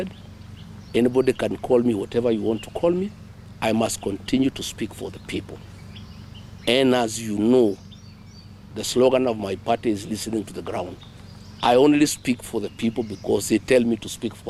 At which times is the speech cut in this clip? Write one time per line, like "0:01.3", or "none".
none